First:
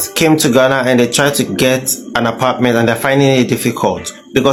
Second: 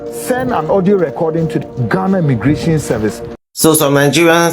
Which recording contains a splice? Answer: second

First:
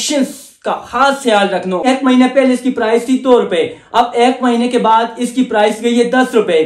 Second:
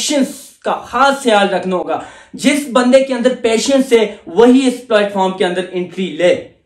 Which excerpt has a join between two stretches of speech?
first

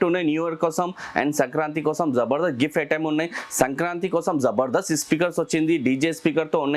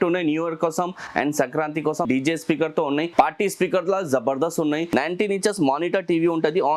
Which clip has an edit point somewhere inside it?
second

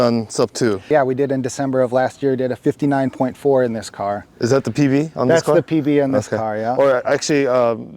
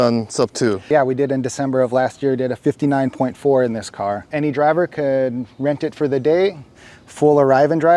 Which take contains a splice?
second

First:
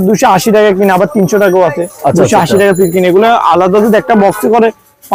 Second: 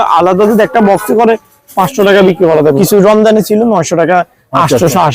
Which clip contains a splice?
second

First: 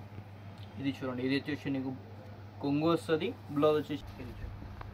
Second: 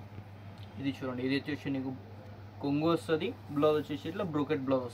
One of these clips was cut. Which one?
first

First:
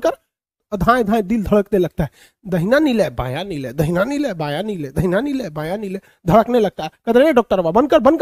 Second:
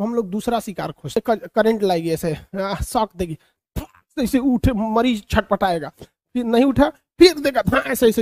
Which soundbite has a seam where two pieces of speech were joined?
second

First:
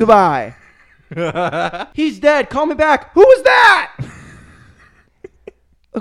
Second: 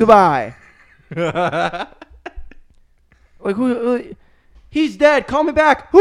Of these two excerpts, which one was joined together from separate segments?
first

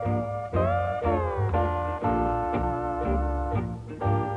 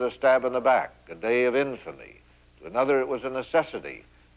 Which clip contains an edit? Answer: first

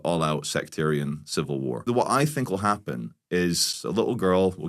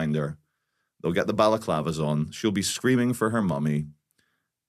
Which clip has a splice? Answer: first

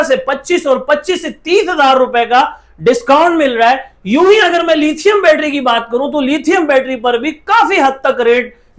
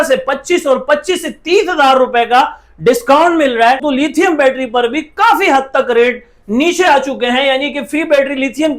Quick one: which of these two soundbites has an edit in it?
second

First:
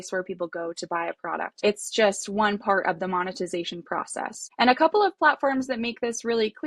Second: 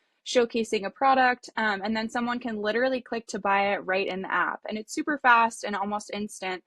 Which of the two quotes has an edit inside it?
first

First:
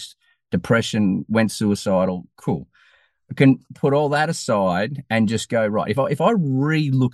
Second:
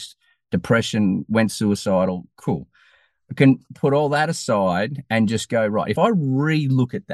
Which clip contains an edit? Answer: second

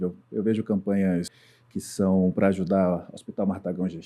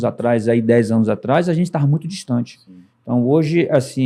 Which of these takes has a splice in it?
first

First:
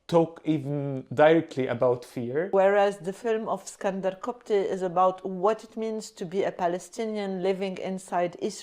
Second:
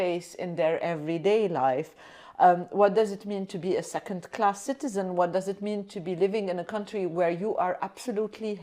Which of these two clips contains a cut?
first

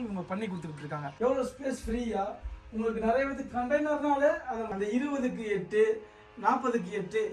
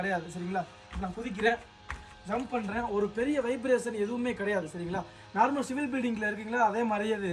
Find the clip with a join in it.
first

